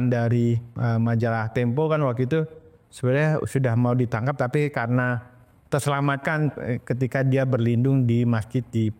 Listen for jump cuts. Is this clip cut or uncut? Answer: uncut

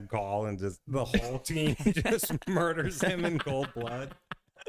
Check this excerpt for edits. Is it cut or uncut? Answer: uncut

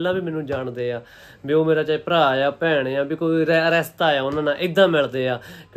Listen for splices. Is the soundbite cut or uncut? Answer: uncut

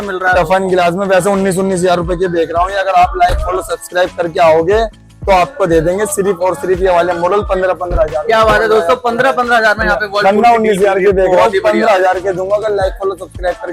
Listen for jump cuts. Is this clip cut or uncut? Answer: uncut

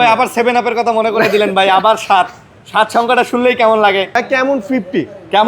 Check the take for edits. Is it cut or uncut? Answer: cut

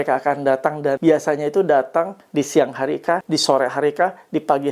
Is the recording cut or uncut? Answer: cut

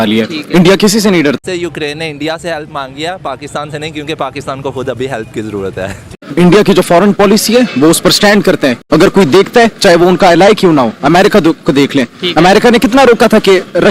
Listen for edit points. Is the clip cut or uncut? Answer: cut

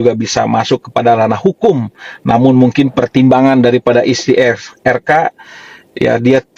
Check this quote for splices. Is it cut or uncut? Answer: uncut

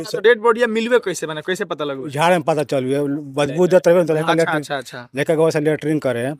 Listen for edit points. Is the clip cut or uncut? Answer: uncut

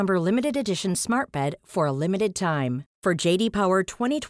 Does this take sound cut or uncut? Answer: uncut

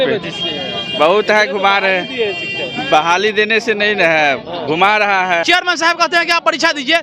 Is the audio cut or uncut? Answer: cut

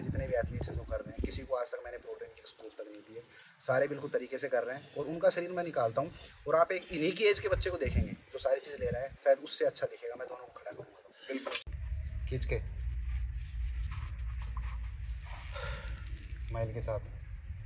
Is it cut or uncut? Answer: cut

